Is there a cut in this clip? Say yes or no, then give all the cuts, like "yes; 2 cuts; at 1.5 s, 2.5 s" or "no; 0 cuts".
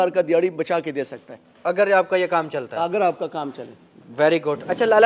no; 0 cuts